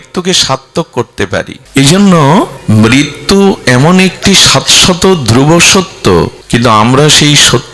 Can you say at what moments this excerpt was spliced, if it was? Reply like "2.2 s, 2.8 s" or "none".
1.6 s, 2.6 s, 6.4 s